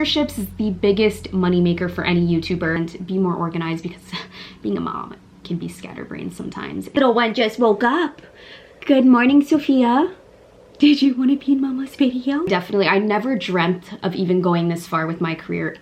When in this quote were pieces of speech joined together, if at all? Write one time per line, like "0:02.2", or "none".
0:02.9
0:06.9
0:12.5